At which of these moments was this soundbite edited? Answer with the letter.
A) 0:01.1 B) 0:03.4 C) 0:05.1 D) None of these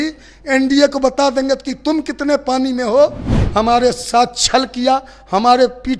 B